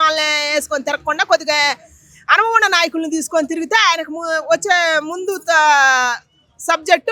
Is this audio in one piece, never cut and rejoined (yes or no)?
yes